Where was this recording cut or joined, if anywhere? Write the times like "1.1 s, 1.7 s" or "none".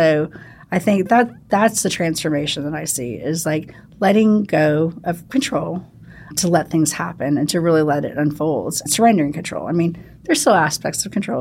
6.3 s, 8.8 s